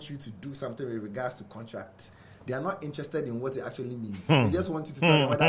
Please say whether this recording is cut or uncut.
uncut